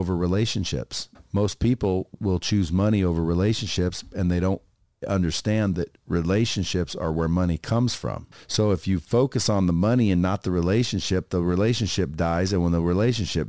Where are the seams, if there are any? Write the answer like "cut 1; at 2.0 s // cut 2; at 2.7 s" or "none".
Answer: cut 1; at 1.1 s // cut 2; at 2.1 s // cut 3; at 8.3 s

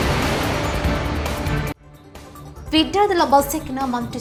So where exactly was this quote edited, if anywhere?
none

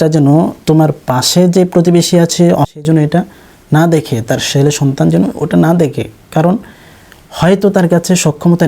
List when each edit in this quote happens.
cut 1; at 2.7 s

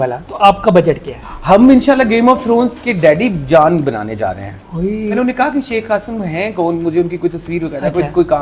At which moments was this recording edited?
cut 1; at 5.1 s

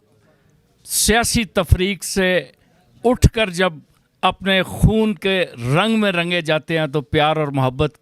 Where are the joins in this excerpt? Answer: none

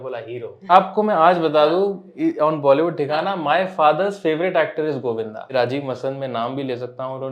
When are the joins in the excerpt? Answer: cut 1; at 0.7 s // cut 2; at 5.5 s

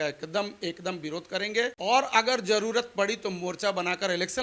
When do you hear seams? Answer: cut 1; at 1.8 s

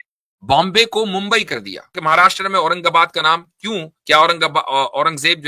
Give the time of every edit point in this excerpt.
cut 1; at 2.0 s

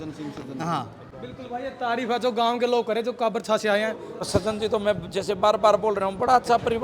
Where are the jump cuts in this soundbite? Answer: cut 1; at 4.2 s

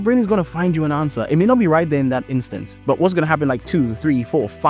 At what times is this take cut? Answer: none

